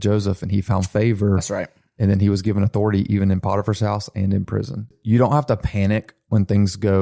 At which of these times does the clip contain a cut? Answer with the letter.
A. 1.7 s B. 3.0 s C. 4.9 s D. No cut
C